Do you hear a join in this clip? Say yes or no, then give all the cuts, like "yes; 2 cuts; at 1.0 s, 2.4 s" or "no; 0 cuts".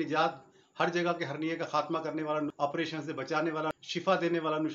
yes; 2 cuts; at 2.5 s, 3.7 s